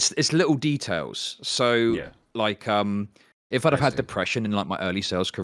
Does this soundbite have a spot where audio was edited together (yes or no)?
yes